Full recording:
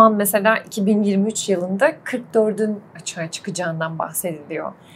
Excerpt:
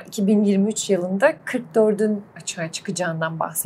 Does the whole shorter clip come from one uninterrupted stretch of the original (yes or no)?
yes